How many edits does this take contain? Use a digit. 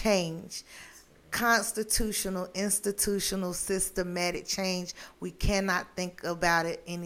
0